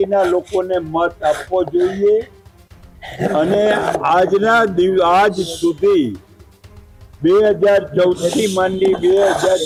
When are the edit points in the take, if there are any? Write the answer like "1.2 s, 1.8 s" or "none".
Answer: none